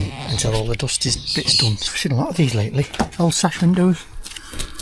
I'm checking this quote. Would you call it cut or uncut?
cut